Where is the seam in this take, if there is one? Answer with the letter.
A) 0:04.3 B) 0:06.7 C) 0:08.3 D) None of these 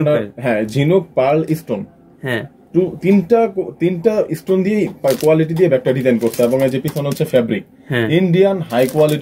D